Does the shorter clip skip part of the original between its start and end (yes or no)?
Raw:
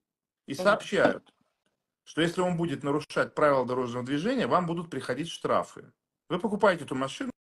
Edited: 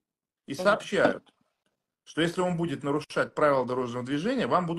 no